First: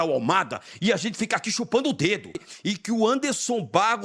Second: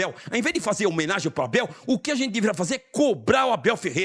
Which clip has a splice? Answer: first; 1 cut; at 2.5 s

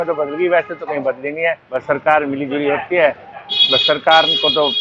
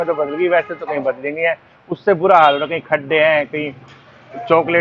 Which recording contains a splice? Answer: first; 1 cut; at 1.7 s

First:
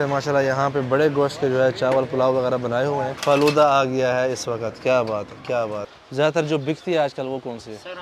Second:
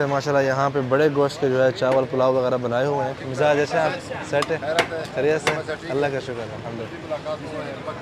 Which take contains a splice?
first; 2 cuts; at 3.2 s, 5.9 s

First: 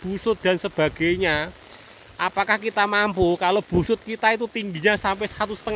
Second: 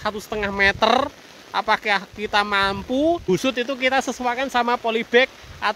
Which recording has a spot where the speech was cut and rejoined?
second; 1 cut; at 3.3 s

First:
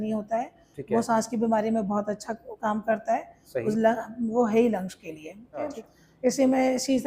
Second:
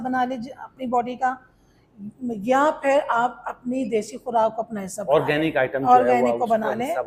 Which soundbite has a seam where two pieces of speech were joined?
first; 1 cut; at 5.7 s

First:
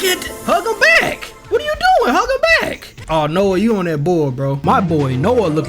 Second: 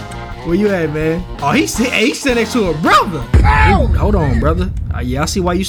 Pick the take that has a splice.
first; 1 cut; at 4.6 s

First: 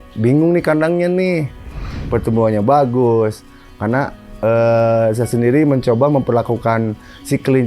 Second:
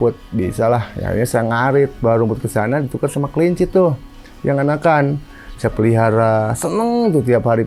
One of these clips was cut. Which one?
first; 1 cut; at 1.8 s

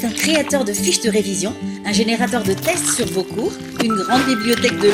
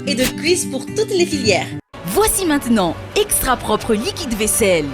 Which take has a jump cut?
second; 1 cut; at 2.0 s

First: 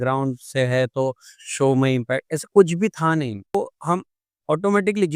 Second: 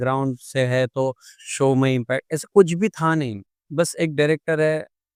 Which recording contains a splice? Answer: first; 1 cut; at 3.5 s

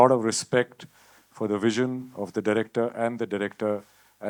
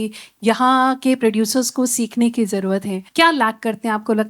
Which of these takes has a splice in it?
second; 1 cut; at 3.0 s

